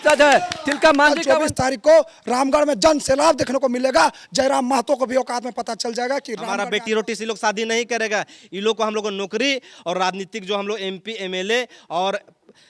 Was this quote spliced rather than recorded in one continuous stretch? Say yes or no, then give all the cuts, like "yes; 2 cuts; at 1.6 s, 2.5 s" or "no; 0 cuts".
yes; 2 cuts; at 1.2 s, 6.6 s